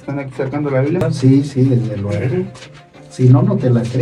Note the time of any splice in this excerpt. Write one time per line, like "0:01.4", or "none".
0:01.0